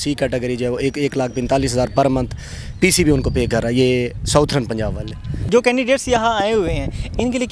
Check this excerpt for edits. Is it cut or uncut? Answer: uncut